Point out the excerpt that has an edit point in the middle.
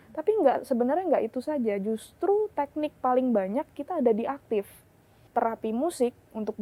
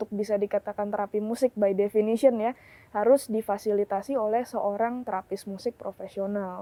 first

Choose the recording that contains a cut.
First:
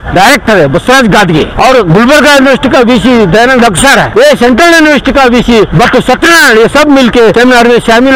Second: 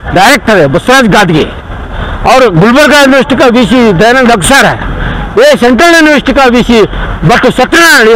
first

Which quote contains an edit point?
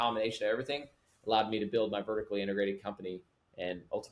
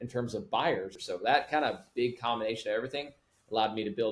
second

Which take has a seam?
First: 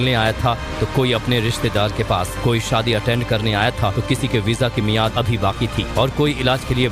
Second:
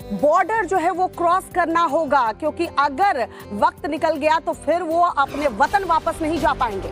first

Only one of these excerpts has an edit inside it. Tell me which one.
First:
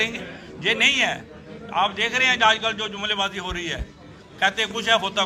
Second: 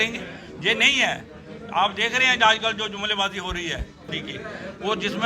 second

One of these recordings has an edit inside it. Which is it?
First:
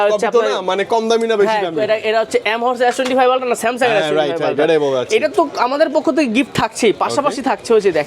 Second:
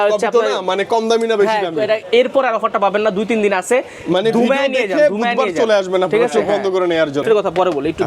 second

